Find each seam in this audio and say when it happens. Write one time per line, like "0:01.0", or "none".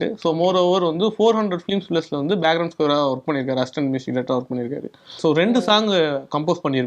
0:05.2